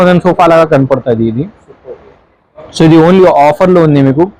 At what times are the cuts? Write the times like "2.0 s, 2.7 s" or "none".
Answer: none